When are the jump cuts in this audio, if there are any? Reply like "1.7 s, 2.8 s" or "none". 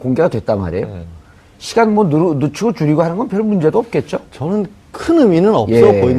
2.1 s